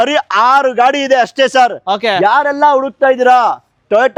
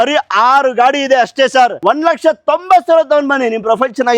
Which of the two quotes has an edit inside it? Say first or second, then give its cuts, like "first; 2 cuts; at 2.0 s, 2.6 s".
second; 1 cut; at 1.8 s